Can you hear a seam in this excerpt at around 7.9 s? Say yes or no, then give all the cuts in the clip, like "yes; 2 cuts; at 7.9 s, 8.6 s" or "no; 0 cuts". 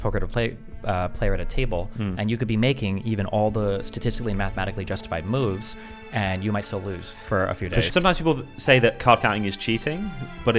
yes; 1 cut; at 7.9 s